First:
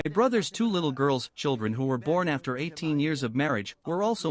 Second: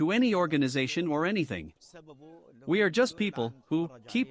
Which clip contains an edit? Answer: first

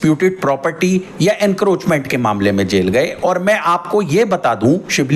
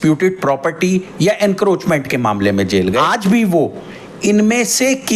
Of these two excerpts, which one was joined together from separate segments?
second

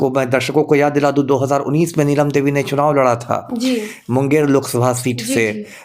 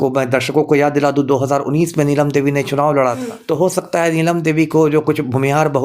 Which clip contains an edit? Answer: second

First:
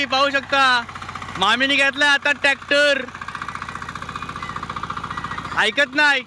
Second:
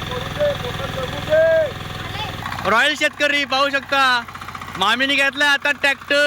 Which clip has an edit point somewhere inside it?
second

